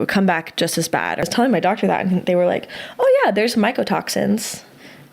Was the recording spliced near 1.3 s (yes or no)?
yes